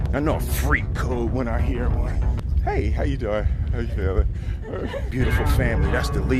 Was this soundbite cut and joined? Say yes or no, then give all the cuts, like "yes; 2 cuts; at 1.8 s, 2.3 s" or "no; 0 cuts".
no; 0 cuts